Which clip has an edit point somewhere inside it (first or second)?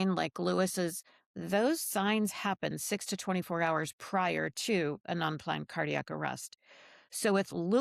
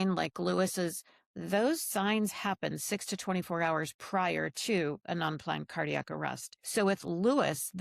second